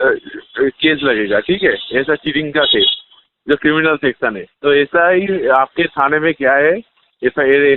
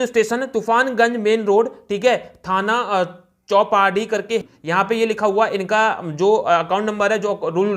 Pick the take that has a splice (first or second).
second